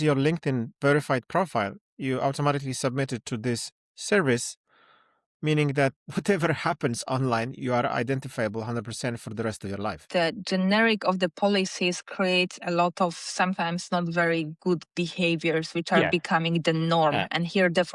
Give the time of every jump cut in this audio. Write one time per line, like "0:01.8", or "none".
0:06.0
0:10.1